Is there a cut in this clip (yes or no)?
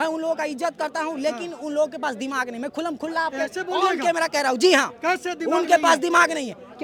no